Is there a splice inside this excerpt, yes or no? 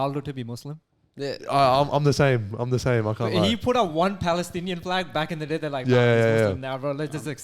no